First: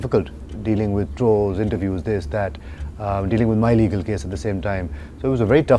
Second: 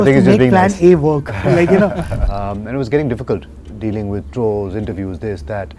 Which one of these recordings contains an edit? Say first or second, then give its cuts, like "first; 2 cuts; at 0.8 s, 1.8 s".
second; 1 cut; at 2.1 s